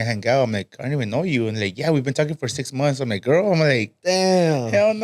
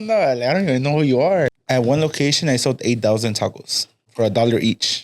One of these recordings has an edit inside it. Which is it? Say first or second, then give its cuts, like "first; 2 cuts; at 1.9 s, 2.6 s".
second; 2 cuts; at 1.5 s, 4.0 s